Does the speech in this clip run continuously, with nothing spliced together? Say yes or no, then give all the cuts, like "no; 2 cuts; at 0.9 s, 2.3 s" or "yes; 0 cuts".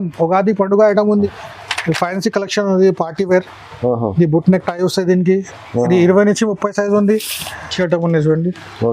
no; 2 cuts; at 1.3 s, 7.7 s